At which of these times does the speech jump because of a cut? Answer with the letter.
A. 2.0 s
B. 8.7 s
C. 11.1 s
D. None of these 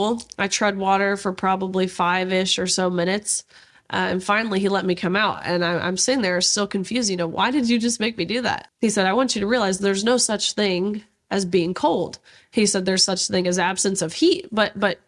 B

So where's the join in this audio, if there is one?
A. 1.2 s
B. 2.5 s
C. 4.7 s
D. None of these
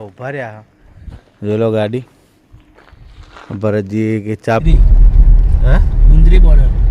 C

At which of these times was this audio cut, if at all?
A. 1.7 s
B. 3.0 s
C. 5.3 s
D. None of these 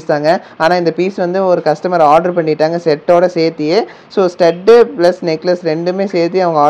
D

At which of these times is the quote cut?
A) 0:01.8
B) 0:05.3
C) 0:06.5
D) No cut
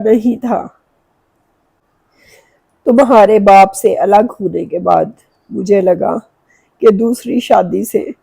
A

